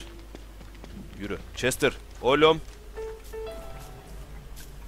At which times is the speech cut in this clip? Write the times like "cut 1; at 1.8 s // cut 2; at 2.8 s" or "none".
cut 1; at 1.8 s